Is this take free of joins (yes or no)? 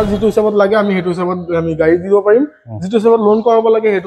yes